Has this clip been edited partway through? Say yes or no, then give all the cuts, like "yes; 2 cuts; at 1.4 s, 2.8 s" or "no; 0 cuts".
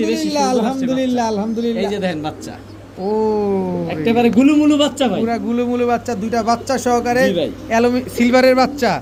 no; 0 cuts